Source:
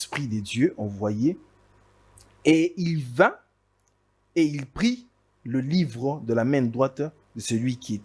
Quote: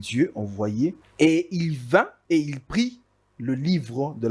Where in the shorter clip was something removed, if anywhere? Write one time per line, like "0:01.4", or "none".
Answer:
0:01.0
0:02.2